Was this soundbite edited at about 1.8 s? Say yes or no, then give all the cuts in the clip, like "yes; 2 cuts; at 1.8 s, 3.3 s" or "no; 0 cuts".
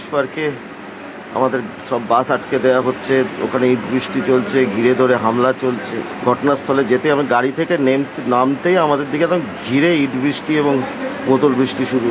no; 0 cuts